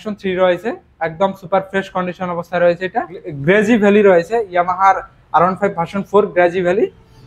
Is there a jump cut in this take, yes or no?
yes